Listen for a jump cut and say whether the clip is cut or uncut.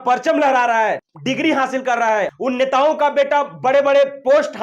cut